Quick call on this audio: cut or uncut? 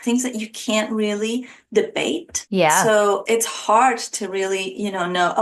cut